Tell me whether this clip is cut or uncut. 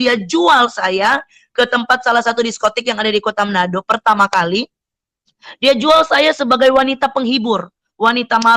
uncut